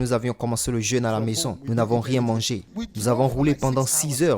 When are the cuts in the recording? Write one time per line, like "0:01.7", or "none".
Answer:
0:02.7

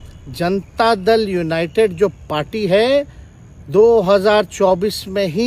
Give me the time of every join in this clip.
none

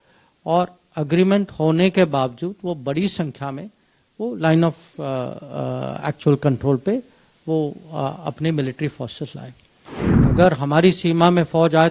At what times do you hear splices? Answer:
0:10.2

